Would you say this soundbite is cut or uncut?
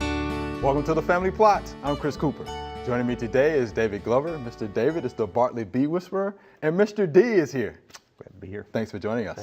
cut